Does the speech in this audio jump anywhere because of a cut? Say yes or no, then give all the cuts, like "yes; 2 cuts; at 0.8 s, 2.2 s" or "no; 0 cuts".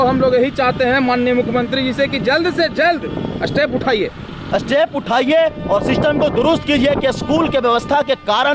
no; 0 cuts